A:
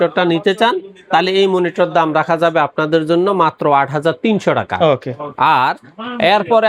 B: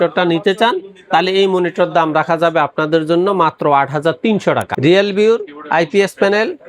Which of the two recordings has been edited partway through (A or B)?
B